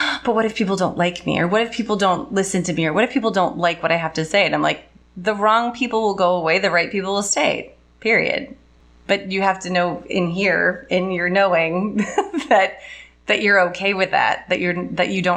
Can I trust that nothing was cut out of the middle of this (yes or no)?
yes